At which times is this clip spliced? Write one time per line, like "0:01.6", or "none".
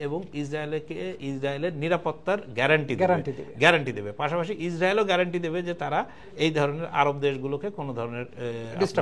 none